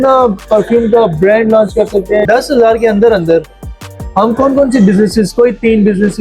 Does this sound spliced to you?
yes; 1 cut; at 2.3 s

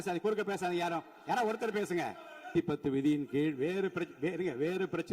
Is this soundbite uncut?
no; 1 cut; at 2.5 s

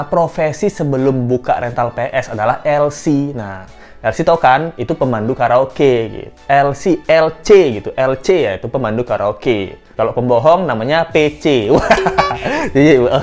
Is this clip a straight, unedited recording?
yes; 0 cuts

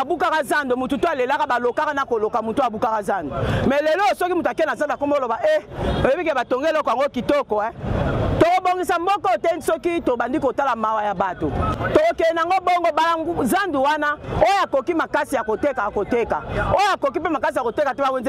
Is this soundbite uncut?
no; 1 cut; at 11.7 s

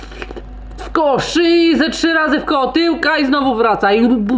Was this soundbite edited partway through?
no; 0 cuts

